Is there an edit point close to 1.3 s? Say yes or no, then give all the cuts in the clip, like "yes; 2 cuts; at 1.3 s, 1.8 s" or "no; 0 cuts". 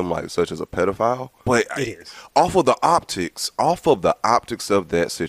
yes; 1 cut; at 1.3 s